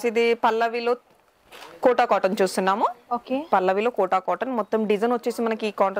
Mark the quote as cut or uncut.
uncut